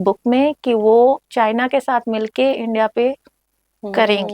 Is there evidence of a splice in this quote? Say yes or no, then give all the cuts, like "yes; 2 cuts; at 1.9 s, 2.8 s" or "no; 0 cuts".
no; 0 cuts